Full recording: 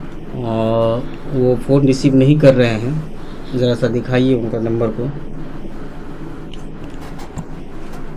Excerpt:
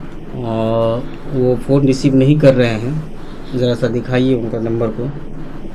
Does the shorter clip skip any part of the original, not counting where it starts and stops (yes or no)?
no